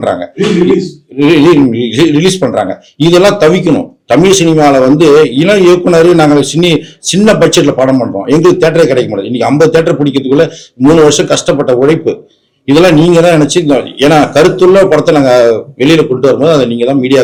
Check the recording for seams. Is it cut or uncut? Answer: uncut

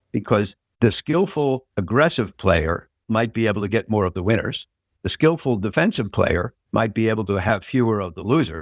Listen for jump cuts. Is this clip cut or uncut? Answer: cut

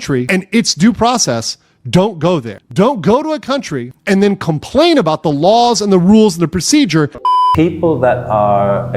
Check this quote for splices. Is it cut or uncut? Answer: cut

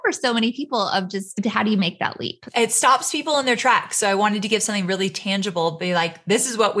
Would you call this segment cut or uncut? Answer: cut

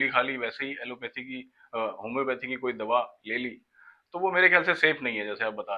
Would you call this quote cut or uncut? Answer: uncut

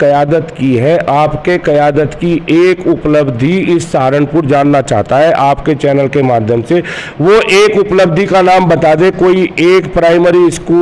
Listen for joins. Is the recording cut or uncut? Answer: uncut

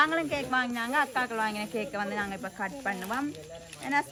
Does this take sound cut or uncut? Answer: uncut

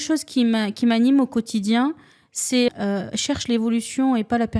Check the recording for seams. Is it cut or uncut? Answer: cut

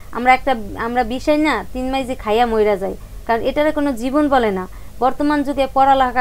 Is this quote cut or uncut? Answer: uncut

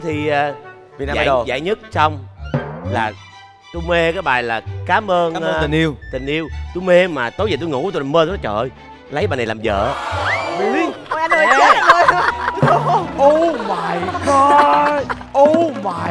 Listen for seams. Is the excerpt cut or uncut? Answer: uncut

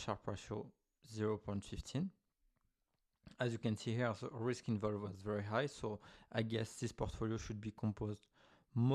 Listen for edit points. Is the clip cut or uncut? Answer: uncut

